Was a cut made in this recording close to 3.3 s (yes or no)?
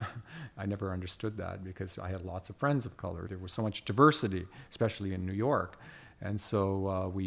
yes